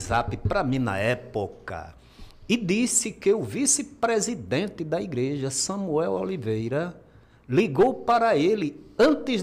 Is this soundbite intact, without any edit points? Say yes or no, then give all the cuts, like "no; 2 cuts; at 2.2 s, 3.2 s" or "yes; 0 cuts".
yes; 0 cuts